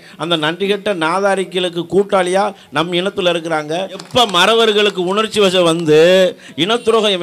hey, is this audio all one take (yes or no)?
no